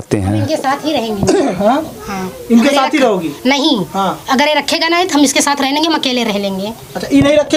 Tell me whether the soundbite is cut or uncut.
uncut